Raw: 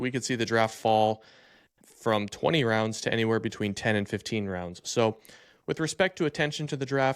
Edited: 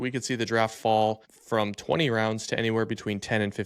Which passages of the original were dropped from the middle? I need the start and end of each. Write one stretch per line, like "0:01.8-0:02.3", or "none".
0:01.3-0:01.9